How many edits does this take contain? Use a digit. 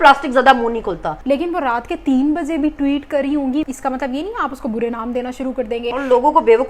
3